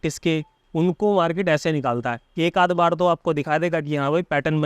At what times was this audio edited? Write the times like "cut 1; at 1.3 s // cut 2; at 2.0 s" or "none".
none